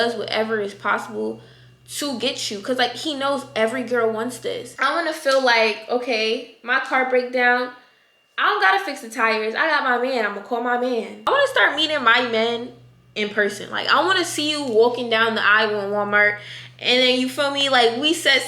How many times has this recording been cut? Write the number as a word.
two